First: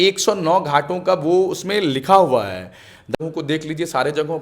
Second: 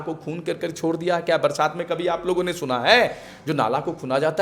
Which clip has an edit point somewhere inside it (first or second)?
first